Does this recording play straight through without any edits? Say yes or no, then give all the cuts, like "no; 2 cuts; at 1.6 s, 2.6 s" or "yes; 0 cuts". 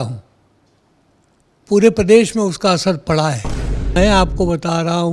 no; 1 cut; at 3.9 s